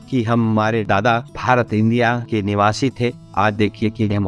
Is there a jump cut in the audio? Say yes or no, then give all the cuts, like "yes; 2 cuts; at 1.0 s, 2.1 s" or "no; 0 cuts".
yes; 3 cuts; at 0.9 s, 2.2 s, 3.2 s